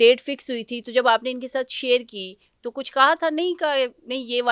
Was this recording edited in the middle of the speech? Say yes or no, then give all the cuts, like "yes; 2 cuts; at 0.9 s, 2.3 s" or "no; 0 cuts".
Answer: no; 0 cuts